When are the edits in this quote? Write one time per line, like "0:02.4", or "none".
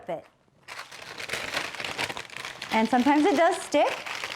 0:01.1